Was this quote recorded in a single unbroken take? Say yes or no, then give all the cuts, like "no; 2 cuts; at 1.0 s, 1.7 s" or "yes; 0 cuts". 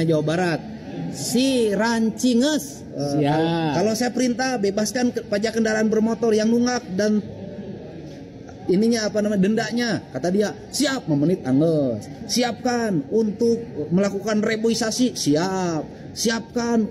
yes; 0 cuts